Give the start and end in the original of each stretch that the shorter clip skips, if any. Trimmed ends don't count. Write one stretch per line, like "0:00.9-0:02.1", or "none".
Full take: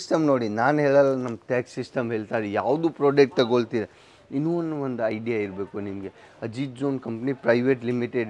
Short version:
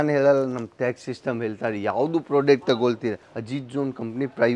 0:04.0-0:06.4